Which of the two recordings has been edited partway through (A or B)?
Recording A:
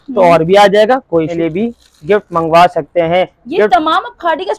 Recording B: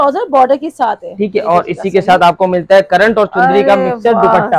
A